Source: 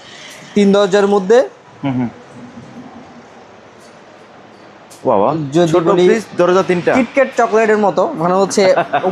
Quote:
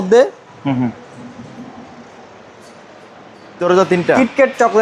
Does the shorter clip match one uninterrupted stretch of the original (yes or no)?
no